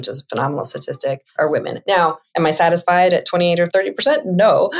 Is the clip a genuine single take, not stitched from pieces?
no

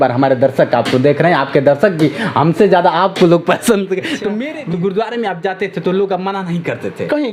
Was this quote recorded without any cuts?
no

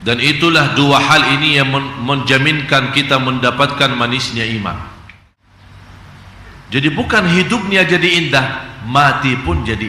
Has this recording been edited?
yes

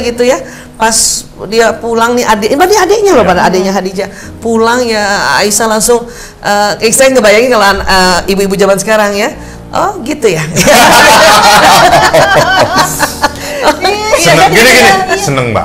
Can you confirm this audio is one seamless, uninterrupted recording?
yes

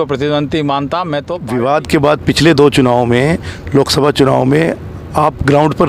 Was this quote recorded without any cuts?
no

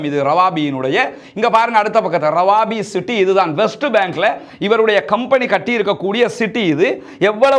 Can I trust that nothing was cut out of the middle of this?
yes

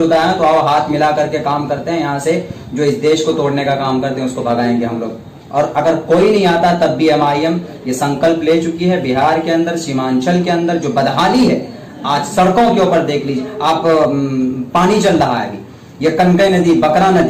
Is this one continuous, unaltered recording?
yes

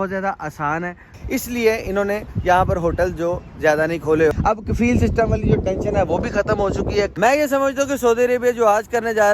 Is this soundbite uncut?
no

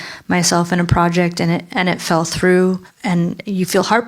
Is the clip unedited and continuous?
no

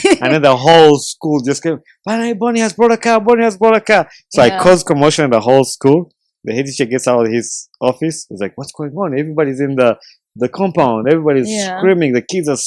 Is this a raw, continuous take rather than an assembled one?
yes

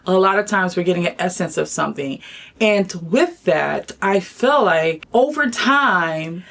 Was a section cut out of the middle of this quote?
yes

